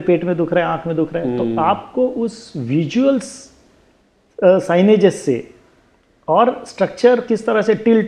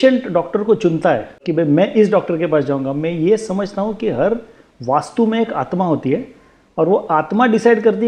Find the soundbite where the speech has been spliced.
second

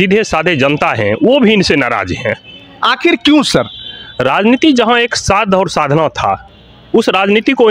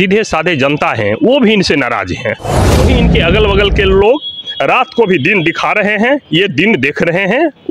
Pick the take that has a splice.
second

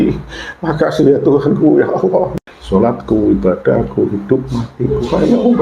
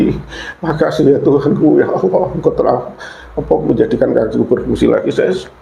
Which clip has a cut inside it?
first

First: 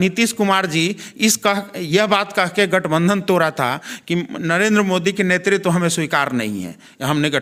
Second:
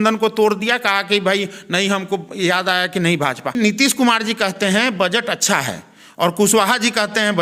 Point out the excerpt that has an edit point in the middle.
second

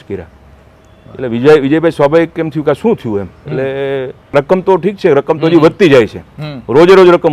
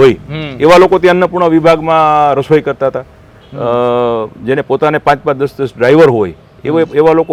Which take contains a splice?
first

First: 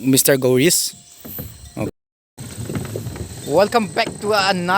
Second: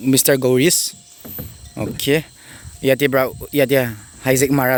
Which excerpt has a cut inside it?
first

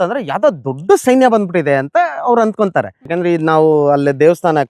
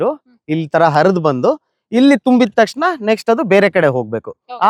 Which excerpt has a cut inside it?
first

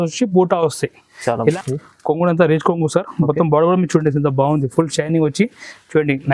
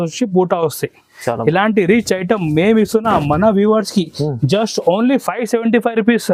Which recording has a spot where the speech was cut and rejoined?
first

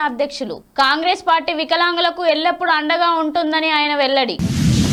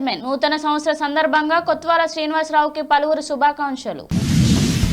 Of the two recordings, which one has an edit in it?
second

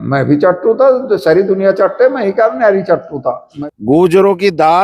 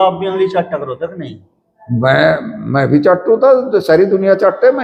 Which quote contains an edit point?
first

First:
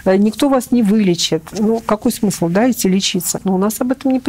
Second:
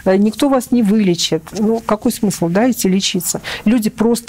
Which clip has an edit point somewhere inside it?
first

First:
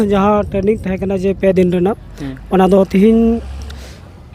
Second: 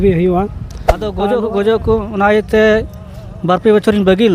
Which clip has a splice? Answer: second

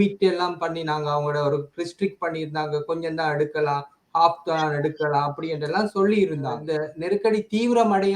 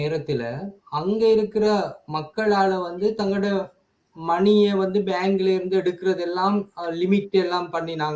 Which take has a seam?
first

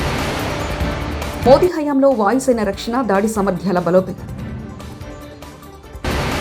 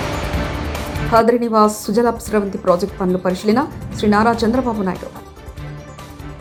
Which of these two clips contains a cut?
first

